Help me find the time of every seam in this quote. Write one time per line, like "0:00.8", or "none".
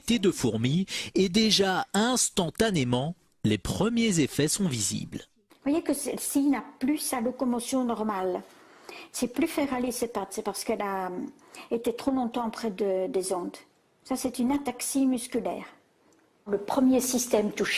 0:16.7